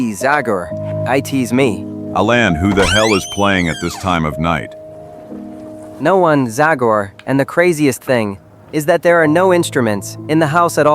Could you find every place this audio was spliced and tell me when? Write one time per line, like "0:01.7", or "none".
0:05.9